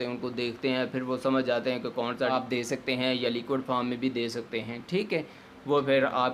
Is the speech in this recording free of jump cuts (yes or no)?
no